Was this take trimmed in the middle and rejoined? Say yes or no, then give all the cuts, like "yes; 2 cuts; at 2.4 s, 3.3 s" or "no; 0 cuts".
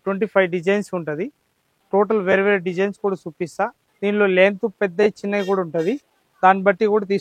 yes; 1 cut; at 3.8 s